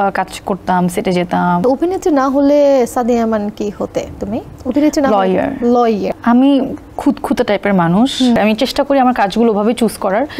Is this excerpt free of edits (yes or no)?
no